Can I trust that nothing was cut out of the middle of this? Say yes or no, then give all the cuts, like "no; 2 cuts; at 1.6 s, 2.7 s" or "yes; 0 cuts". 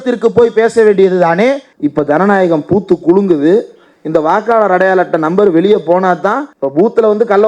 no; 2 cuts; at 1.7 s, 6.6 s